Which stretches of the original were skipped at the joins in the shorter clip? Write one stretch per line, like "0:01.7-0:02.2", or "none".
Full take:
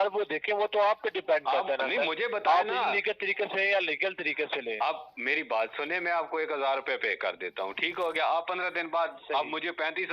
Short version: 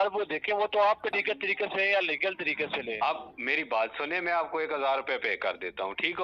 0:01.2-0:03.0

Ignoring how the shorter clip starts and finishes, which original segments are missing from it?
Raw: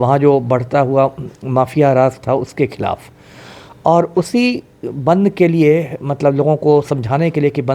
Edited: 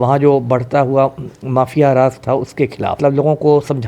0:03.0-0:06.2

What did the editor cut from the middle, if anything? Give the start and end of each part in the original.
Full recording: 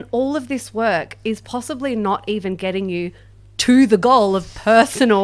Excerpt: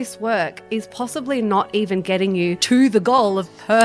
0:03.1-0:03.6

